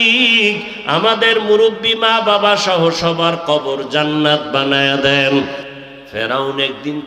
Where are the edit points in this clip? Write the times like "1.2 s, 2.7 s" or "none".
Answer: 5.6 s